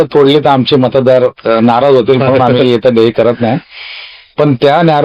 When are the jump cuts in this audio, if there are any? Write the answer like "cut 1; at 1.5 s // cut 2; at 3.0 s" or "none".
none